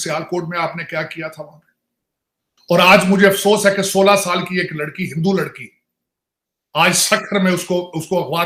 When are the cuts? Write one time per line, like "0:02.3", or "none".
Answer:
none